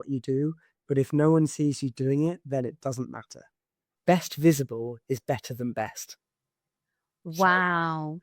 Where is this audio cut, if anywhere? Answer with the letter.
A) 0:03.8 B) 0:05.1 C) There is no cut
A